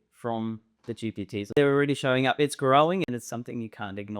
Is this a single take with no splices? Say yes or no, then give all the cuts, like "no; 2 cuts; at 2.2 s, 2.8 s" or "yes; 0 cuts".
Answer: no; 2 cuts; at 1.6 s, 3.1 s